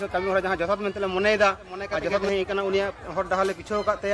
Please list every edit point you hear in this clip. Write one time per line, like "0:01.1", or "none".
0:02.2